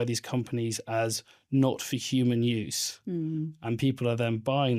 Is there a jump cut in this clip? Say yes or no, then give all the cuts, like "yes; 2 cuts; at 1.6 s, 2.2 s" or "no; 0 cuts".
no; 0 cuts